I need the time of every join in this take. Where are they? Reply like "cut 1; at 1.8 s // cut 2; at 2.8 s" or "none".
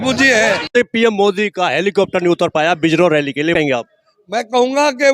cut 1; at 0.7 s // cut 2; at 3.5 s